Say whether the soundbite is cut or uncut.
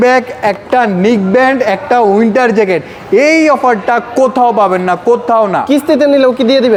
uncut